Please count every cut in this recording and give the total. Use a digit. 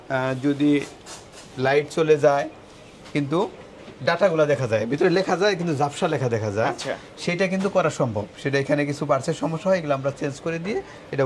0